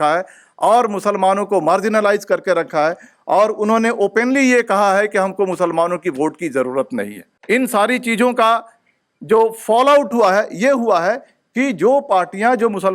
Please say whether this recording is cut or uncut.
cut